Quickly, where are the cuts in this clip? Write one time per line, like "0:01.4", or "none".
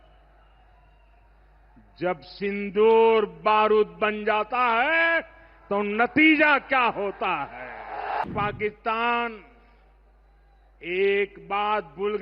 0:08.2